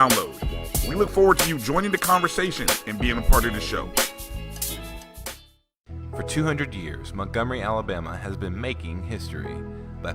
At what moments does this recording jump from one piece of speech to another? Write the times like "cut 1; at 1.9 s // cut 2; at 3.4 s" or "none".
cut 1; at 5.9 s

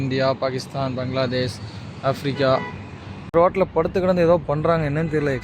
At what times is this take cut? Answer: cut 1; at 3.3 s

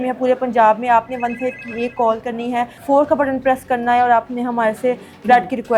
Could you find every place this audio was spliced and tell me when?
cut 1; at 2.8 s

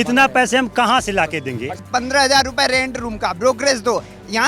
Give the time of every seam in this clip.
cut 1; at 1.8 s

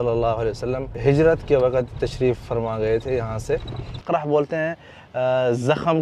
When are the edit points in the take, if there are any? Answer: cut 1; at 0.9 s // cut 2; at 2.4 s // cut 3; at 4.0 s

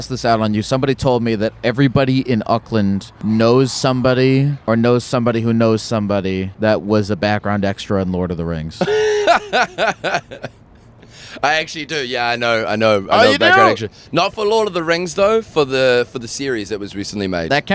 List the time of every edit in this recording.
cut 1; at 3.1 s // cut 2; at 4.5 s // cut 3; at 6.5 s

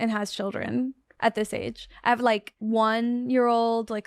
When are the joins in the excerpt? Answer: cut 1; at 2.5 s

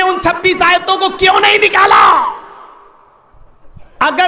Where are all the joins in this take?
cut 1; at 3.3 s

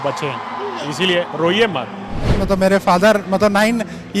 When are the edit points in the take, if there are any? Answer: cut 1; at 2.4 s

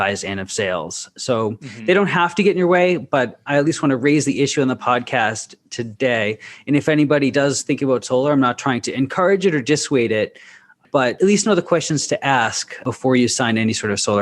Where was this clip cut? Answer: cut 1; at 11.1 s // cut 2; at 12.8 s

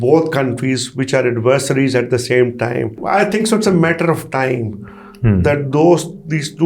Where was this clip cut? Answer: cut 1; at 3.0 s

